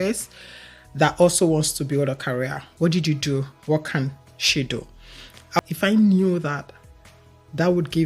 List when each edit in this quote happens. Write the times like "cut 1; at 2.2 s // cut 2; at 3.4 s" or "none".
cut 1; at 5.6 s